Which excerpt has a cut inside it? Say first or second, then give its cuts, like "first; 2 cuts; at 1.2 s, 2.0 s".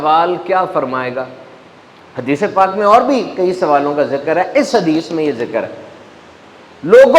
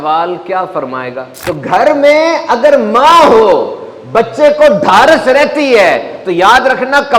second; 1 cut; at 1.3 s